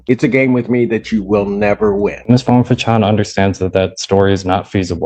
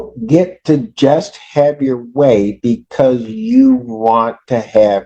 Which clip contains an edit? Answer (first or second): first